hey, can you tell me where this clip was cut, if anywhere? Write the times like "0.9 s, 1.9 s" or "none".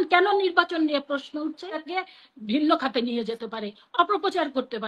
1.8 s